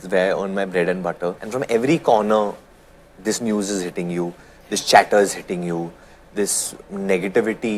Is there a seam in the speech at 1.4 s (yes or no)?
yes